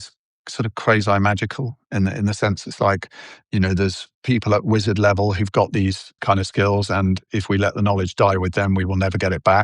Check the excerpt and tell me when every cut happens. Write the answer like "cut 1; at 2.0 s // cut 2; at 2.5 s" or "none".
cut 1; at 4.0 s // cut 2; at 6.2 s // cut 3; at 7.2 s